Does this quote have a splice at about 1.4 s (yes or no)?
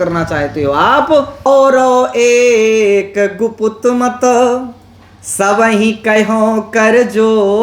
yes